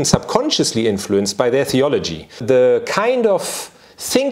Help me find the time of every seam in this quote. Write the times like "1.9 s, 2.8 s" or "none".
2.4 s